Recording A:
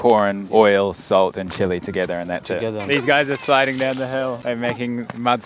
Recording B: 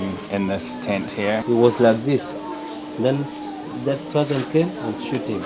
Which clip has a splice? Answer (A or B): A